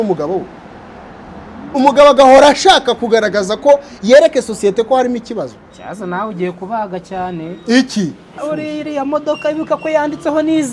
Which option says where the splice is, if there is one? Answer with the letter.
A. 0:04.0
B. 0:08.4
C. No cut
B